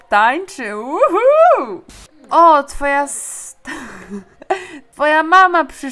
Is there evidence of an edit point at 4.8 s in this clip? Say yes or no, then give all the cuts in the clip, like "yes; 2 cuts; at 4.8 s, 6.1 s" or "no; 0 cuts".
yes; 1 cut; at 4.8 s